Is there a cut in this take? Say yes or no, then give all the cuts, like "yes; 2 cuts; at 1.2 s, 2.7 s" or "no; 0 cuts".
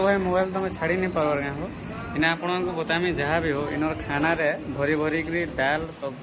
no; 0 cuts